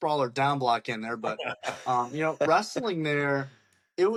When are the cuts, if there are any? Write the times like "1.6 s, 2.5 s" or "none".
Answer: none